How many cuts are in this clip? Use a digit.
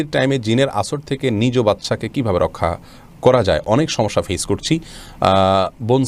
0